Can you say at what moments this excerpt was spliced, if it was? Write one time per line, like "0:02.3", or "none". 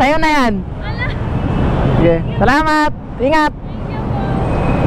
none